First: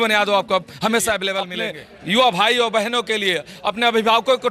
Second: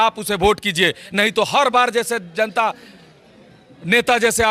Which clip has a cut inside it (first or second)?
first